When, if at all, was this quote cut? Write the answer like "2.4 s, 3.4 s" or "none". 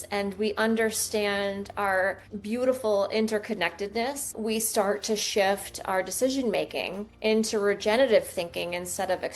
2.3 s, 4.3 s, 7.0 s